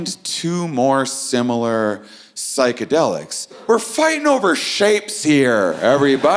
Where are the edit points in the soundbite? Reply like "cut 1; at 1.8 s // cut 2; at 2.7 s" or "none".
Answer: cut 1; at 3.6 s